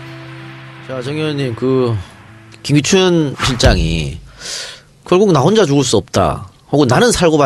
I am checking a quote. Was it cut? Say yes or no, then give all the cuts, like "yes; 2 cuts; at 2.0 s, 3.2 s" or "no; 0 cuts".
no; 0 cuts